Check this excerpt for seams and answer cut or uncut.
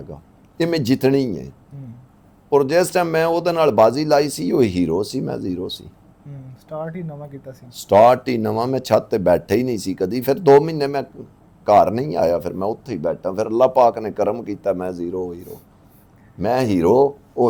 uncut